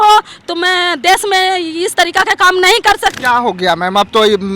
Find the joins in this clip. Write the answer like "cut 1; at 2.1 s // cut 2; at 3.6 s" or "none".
cut 1; at 3.2 s